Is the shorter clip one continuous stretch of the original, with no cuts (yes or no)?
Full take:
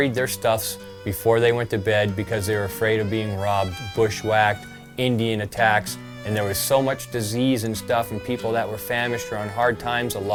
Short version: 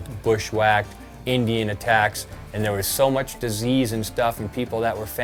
yes